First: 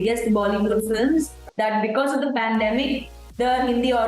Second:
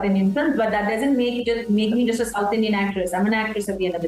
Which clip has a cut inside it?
first; 1 cut; at 1.4 s

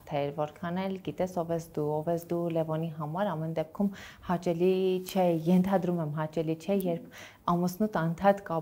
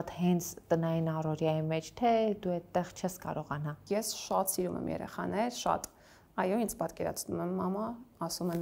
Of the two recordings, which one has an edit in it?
second; 1 cut; at 3.8 s

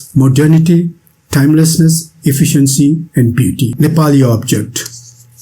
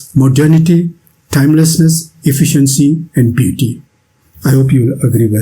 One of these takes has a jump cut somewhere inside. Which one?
first; 1 cut; at 3.7 s

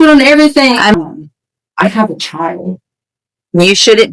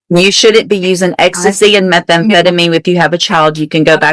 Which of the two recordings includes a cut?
first; 1 cut; at 0.9 s

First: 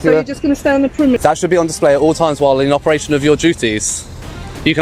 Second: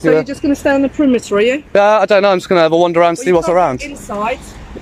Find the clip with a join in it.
first; 2 cuts; at 1.2 s, 3.9 s

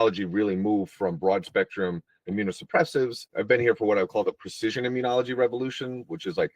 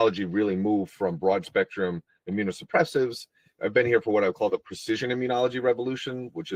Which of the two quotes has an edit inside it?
first; 1 cut; at 3.2 s

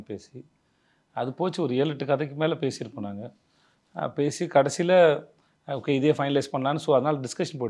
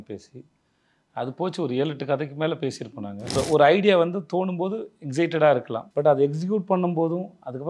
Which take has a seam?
second; 2 cuts; at 3.3 s, 5.8 s

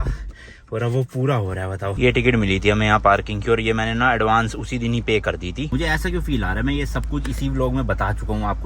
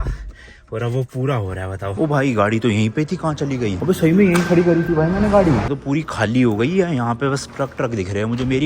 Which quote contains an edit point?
second; 1 cut; at 1.9 s

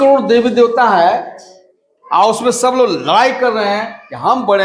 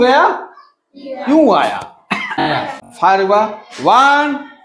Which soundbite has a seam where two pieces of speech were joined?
second; 1 cut; at 2.5 s

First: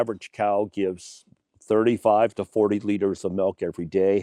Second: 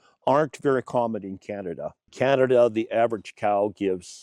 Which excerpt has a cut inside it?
second; 1 cut; at 2.1 s

